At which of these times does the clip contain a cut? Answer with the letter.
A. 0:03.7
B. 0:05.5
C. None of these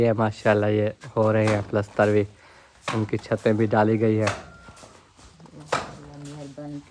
C